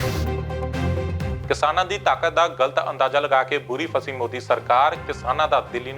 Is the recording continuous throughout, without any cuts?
no; 1 cut; at 1.4 s

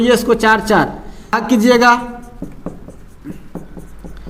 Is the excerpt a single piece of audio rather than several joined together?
no; 1 cut; at 1.4 s

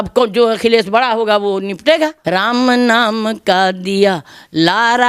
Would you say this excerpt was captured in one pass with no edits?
no; 1 cut; at 2.2 s

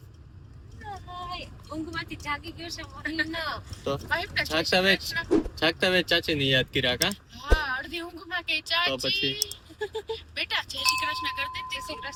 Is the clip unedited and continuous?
yes; 0 cuts

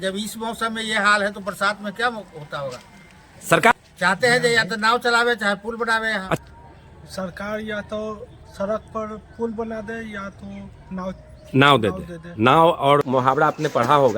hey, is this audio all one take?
no; 3 cuts; at 3.7 s, 6.4 s, 13.0 s

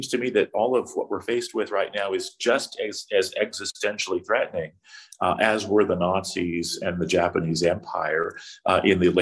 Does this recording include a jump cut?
no; 0 cuts

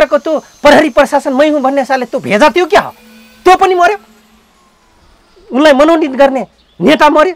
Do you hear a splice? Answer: no; 0 cuts

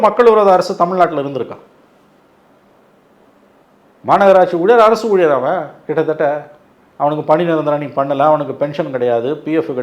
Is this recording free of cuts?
yes; 0 cuts

